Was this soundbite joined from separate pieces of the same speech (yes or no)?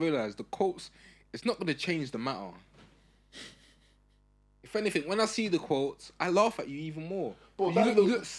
no